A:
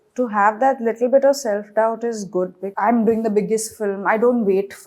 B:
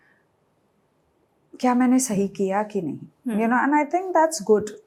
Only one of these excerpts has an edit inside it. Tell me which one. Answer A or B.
A